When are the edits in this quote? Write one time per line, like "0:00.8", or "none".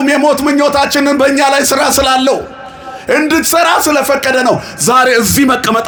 none